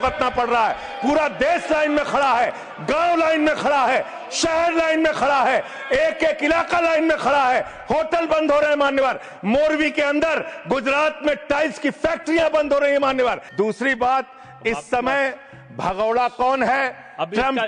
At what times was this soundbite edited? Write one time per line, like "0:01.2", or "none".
0:13.4